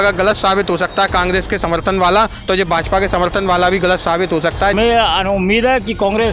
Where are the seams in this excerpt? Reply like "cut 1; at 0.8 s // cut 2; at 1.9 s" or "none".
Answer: cut 1; at 4.7 s